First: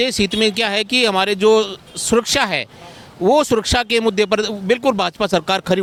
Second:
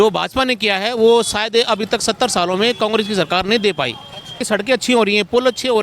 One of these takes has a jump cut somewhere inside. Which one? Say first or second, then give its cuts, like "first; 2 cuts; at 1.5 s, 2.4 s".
second; 1 cut; at 4.4 s